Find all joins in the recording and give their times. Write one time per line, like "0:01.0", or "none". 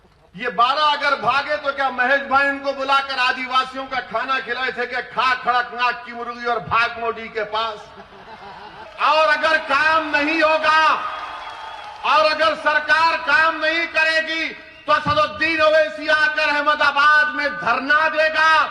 0:08.8